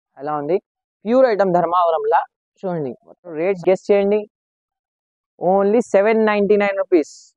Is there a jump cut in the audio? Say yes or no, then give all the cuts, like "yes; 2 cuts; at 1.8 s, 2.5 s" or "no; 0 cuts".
yes; 1 cut; at 3.4 s